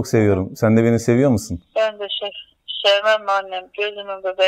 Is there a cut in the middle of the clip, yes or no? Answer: no